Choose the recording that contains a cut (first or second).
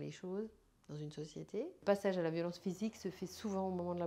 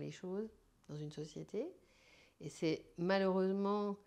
first